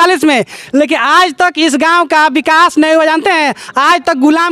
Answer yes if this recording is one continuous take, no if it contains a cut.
yes